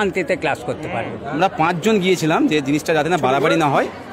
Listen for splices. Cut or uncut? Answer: cut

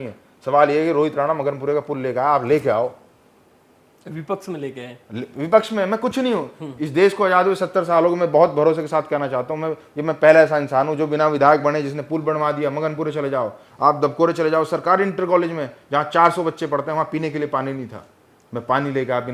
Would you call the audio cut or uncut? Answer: uncut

